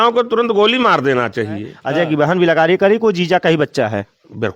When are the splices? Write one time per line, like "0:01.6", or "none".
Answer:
0:01.8